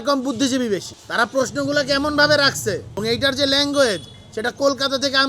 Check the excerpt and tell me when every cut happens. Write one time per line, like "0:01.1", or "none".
0:02.9